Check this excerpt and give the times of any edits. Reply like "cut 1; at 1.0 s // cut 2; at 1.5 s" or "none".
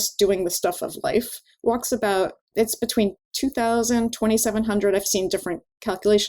cut 1; at 2.4 s